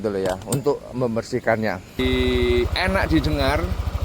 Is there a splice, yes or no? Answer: yes